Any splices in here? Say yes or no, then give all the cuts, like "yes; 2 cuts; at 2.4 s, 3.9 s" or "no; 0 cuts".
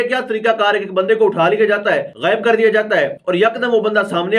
yes; 2 cuts; at 2.1 s, 3.2 s